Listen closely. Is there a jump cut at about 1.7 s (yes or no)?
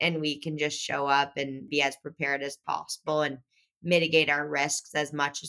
yes